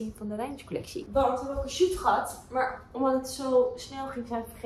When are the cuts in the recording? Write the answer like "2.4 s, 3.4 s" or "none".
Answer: none